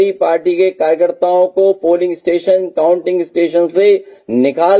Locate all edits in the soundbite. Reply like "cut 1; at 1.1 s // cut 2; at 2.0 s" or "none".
none